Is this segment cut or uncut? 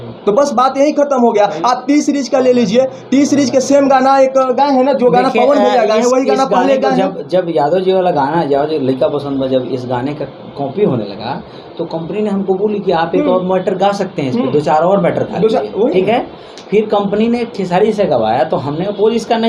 uncut